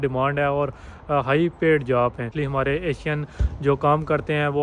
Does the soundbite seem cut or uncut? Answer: cut